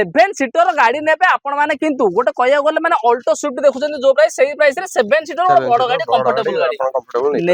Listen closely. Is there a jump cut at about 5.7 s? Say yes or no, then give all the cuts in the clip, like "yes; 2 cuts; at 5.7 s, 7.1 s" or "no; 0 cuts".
no; 0 cuts